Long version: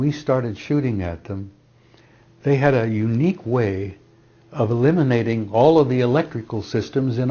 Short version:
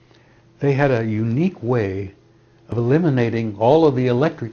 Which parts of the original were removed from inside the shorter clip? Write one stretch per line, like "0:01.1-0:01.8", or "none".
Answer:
0:04.6-0:04.7